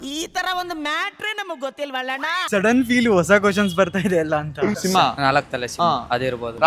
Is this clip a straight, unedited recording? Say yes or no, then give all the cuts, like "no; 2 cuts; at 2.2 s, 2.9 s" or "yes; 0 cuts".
no; 2 cuts; at 2.4 s, 4.8 s